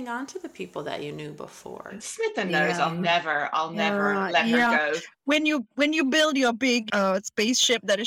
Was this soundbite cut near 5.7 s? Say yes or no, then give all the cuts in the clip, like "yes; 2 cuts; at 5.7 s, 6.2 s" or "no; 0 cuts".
no; 1 cut; at 6.9 s